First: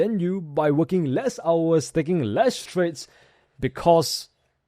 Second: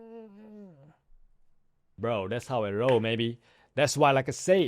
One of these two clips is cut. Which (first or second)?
second